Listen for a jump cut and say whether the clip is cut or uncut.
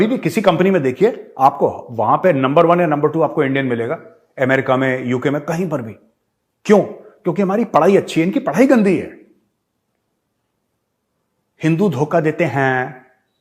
uncut